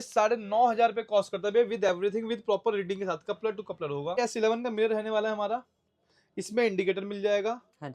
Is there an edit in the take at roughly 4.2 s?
yes; 1 cut; at 4.2 s

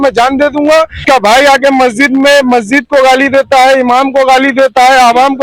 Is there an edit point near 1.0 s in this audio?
yes; 1 cut; at 1.0 s

